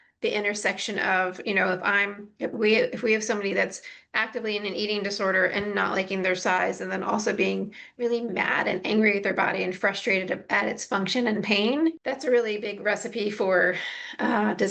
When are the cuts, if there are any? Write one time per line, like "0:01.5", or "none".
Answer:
0:12.0